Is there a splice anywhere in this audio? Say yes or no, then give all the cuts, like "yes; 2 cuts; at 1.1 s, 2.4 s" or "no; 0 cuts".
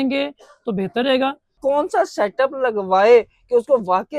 yes; 1 cut; at 1.6 s